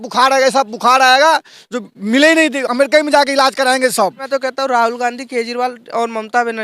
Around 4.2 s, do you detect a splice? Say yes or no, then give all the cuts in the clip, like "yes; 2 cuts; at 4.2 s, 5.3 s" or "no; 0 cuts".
yes; 1 cut; at 4.2 s